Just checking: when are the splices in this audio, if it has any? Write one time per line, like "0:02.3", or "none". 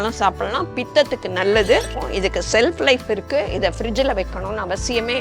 0:02.0